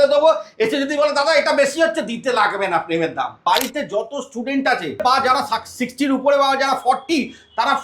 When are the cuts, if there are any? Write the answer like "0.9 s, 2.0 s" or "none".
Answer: 3.4 s, 5.0 s